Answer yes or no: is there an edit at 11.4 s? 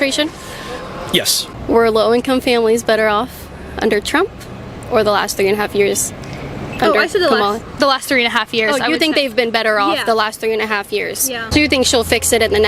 yes